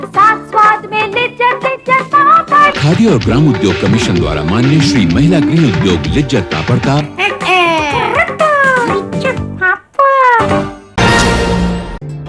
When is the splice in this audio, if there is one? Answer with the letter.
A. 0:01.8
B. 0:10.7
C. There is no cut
B